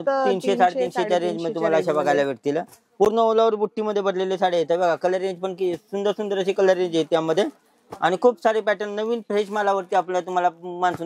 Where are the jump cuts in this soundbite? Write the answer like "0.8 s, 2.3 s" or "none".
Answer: none